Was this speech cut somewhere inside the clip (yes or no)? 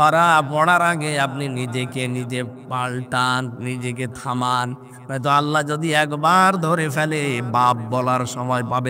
no